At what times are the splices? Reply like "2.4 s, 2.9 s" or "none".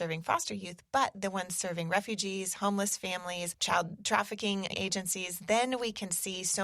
3.5 s, 4.7 s